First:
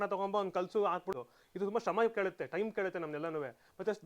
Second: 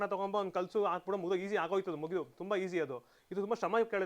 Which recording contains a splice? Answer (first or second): first